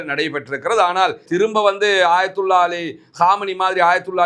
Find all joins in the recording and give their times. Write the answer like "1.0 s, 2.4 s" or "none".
1.2 s